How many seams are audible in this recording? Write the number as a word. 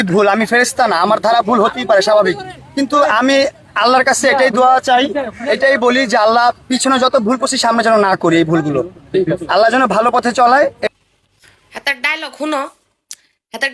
zero